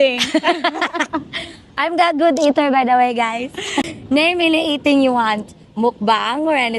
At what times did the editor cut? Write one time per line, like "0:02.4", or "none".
0:03.9